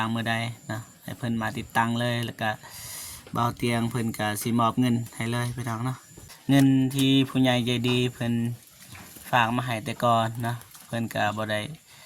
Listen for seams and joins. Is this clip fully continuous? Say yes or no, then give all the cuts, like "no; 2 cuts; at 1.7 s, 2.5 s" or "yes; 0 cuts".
no; 1 cut; at 6.1 s